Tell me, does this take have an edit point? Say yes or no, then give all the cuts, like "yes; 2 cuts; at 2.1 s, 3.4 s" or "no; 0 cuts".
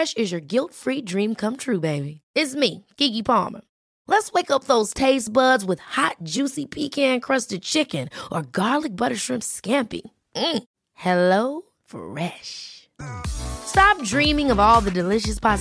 no; 0 cuts